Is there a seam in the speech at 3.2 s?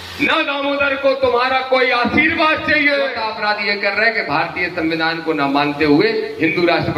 yes; 1 cut; at 3.2 s

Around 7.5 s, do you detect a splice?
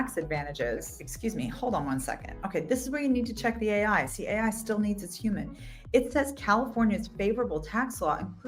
no; 1 cut; at 1.0 s

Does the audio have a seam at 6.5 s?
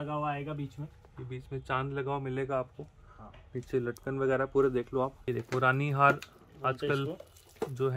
no; 1 cut; at 5.2 s

